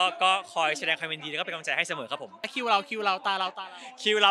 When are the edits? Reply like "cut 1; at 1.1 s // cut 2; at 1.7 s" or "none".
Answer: cut 1; at 2.5 s

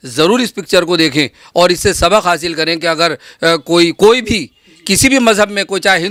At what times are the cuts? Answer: none

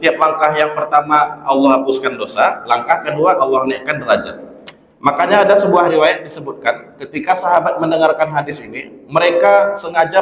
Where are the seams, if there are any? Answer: none

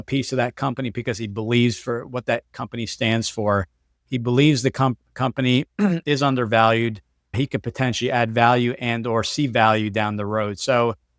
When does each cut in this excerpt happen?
none

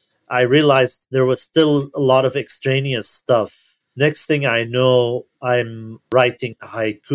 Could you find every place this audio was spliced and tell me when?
none

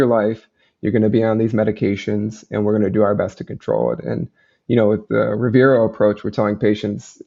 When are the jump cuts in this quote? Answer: none

